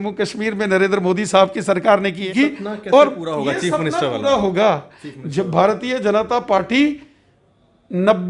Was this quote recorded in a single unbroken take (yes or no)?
no